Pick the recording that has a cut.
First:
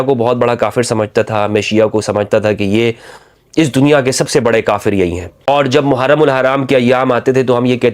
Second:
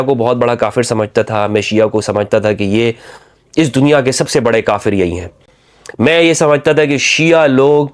first; 1 cut; at 5.3 s

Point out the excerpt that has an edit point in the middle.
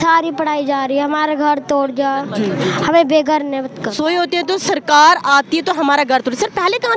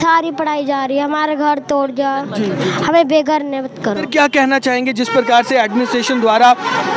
first; 1 cut; at 3.9 s

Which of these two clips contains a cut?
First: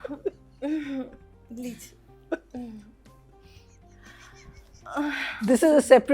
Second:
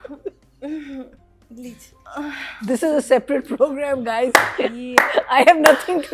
second; 1 cut; at 1.9 s

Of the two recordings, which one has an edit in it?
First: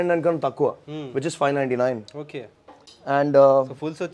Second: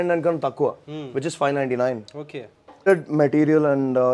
second; 1 cut; at 2.8 s

